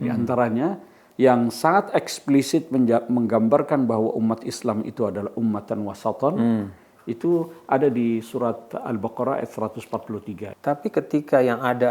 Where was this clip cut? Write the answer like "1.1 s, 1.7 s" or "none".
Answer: 10.5 s

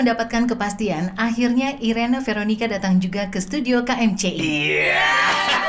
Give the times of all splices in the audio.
none

